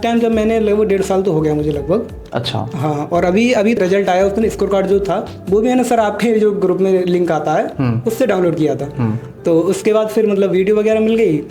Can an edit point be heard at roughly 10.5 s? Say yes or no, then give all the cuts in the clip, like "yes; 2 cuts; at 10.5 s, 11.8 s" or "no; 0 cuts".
no; 1 cut; at 3.8 s